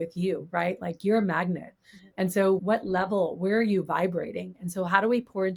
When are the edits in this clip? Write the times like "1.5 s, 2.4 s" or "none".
none